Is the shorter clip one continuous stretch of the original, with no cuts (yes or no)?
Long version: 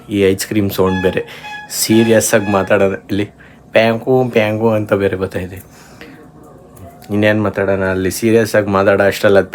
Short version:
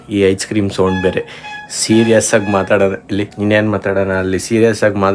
no